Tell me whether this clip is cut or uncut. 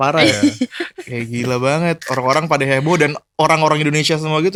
uncut